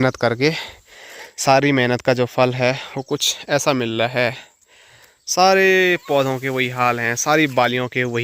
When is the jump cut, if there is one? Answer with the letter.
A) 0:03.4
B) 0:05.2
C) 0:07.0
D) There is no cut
D